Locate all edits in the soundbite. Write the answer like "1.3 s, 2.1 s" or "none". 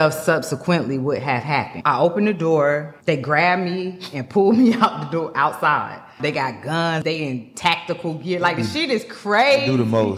1.7 s, 2.9 s, 6.1 s, 7.0 s